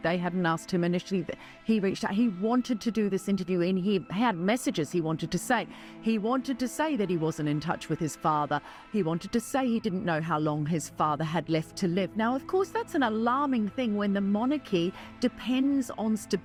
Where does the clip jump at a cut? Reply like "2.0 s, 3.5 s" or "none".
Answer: none